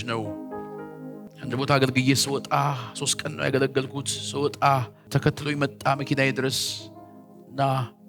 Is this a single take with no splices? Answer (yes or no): no